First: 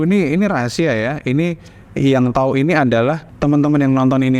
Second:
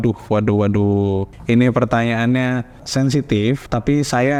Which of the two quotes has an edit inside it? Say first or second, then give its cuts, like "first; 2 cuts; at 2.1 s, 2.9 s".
first; 1 cut; at 3.3 s